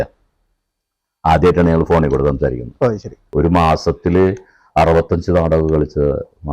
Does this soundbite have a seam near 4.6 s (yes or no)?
no